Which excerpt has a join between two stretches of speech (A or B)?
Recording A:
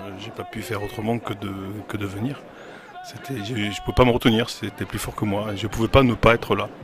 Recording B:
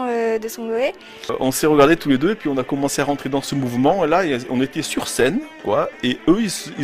B